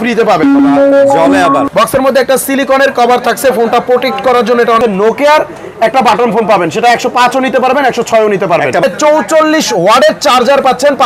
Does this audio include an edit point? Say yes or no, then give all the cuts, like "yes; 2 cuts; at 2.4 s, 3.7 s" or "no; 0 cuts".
yes; 3 cuts; at 1.7 s, 4.8 s, 8.8 s